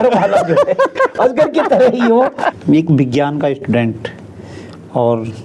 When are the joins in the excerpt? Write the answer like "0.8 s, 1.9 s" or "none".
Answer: 2.5 s